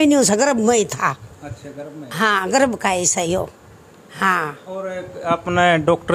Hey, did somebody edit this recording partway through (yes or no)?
no